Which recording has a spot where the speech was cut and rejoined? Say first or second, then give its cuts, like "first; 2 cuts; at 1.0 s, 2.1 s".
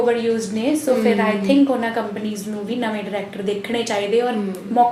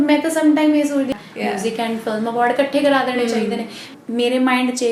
second; 2 cuts; at 1.1 s, 3.9 s